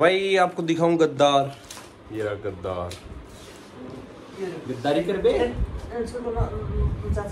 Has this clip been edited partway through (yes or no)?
no